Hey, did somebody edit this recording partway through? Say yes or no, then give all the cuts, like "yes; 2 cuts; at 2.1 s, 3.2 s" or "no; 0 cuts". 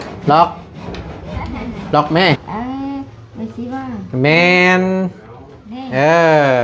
yes; 1 cut; at 2.4 s